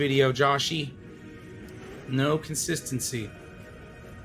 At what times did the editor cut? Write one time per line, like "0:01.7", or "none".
0:03.3